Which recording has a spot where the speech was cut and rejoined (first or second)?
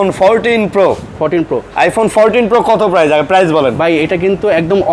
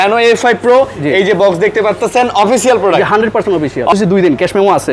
second